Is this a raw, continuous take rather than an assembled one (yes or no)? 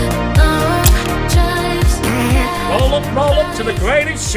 yes